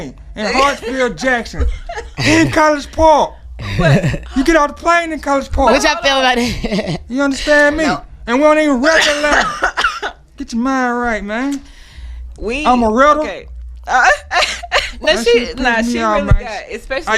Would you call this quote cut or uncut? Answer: cut